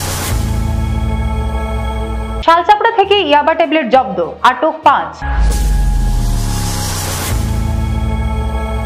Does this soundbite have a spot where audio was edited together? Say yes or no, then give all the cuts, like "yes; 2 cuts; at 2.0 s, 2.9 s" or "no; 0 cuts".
yes; 1 cut; at 2.0 s